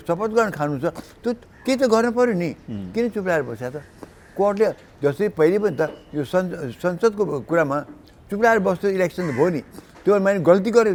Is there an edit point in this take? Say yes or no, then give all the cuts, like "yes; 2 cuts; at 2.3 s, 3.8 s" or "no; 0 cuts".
no; 0 cuts